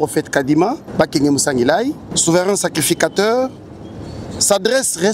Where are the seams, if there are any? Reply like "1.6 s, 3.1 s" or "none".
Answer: 0.8 s, 2.1 s